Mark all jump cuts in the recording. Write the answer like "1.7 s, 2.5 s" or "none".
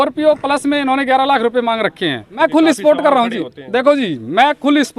2.3 s